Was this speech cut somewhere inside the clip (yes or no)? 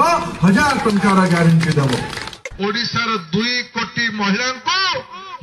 yes